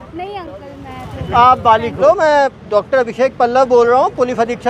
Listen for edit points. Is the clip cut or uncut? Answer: cut